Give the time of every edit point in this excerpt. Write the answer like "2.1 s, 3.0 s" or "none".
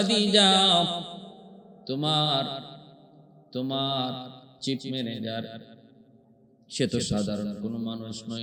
none